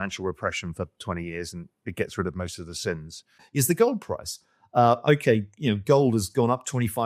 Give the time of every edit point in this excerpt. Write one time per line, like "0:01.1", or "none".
0:03.4